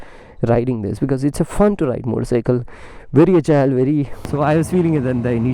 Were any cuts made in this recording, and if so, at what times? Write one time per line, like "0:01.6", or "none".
0:04.2